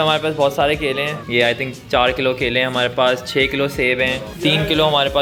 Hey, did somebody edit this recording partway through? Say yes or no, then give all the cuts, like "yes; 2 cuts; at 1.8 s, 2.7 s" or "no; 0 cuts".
no; 0 cuts